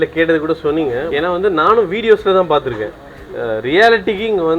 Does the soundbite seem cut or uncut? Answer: cut